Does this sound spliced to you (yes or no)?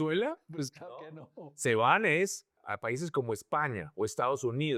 no